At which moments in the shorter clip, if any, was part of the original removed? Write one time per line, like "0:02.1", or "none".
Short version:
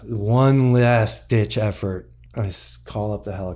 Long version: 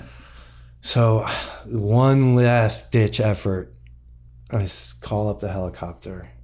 0:02.2